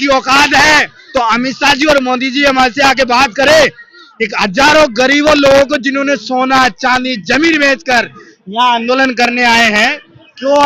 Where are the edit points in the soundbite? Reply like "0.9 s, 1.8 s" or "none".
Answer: none